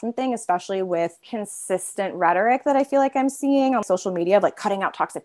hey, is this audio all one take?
no; 2 cuts; at 1.2 s, 3.8 s

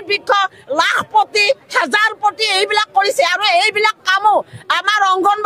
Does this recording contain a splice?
no; 0 cuts

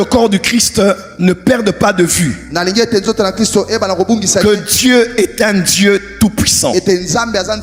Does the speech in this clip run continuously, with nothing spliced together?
yes; 0 cuts

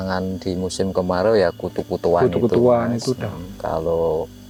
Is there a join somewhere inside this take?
no; 0 cuts

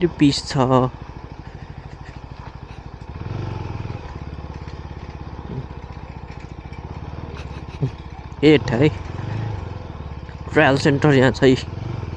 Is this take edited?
no; 0 cuts

